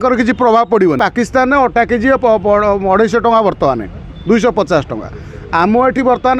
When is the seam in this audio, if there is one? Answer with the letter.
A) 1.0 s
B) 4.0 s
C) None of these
A